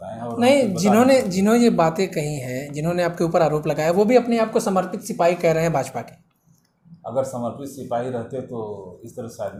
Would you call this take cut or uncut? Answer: uncut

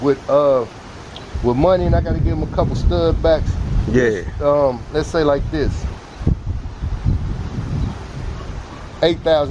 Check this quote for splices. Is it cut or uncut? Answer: uncut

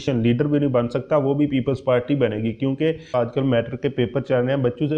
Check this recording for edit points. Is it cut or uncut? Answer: cut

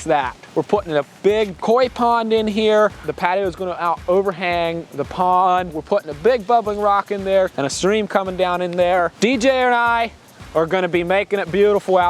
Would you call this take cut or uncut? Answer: cut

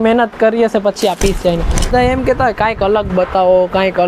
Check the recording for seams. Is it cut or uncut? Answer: cut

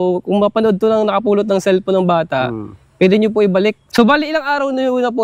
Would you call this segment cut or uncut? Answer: cut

